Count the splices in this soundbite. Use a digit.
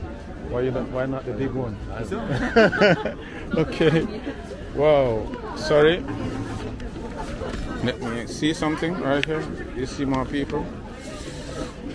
0